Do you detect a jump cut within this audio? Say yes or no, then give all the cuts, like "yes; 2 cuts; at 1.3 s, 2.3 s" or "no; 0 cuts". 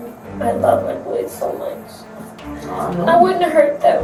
no; 0 cuts